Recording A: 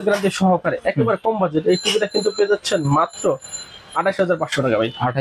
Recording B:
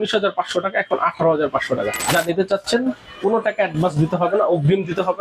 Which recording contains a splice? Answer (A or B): B